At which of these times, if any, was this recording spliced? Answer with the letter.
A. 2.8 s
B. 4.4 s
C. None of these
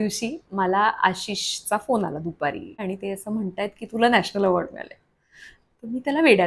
A